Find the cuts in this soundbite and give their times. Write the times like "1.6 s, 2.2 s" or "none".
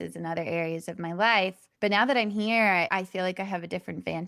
1.6 s